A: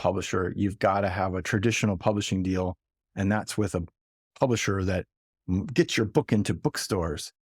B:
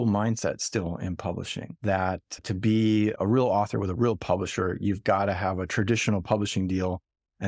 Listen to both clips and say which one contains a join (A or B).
B